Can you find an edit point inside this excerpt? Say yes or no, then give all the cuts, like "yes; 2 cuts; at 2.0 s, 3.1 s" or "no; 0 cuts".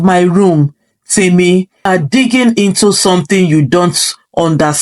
yes; 1 cut; at 1.8 s